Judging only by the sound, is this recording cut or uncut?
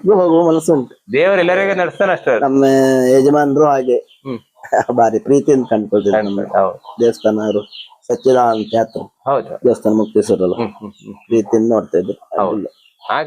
uncut